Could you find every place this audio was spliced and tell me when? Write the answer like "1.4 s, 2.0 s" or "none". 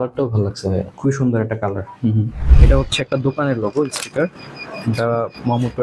2.5 s